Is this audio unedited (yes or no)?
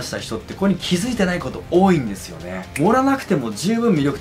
no